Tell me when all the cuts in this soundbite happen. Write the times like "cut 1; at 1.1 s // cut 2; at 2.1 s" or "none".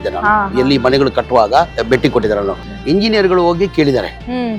cut 1; at 1.8 s // cut 2; at 2.7 s